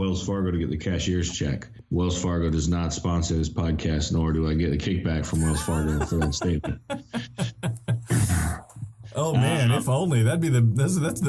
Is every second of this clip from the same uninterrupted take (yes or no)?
no